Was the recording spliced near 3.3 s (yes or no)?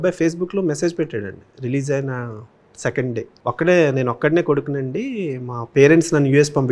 yes